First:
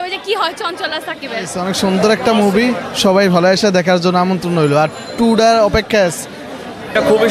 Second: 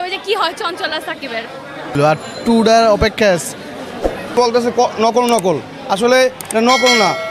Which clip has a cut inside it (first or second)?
second